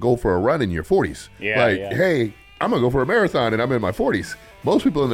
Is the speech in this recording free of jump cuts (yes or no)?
no